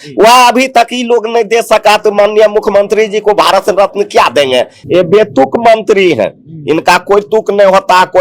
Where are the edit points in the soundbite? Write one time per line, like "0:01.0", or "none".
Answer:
0:04.8